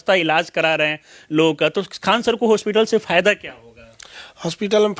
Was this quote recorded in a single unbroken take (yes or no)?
yes